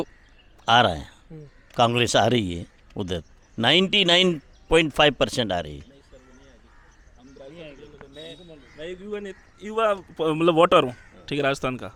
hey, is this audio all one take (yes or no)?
yes